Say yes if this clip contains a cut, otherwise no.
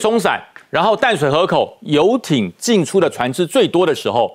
no